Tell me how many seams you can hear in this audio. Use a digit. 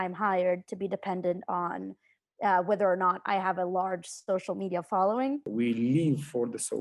1